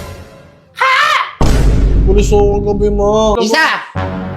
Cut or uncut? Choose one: cut